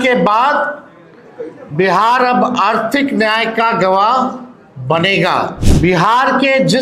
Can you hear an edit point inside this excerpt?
yes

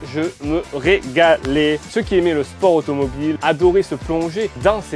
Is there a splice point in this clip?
yes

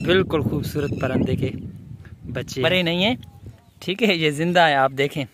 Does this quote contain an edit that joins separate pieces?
yes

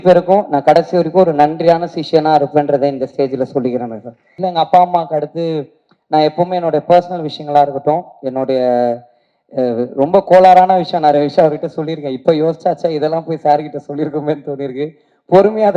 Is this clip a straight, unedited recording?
no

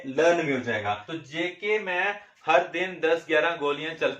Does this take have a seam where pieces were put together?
yes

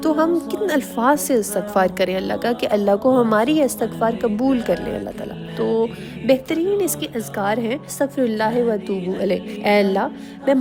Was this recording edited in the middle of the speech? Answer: no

